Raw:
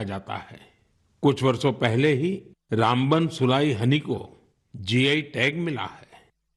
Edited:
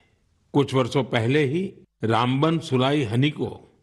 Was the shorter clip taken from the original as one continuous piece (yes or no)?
yes